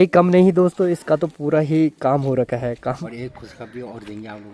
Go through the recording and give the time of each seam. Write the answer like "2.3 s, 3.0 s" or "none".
3.0 s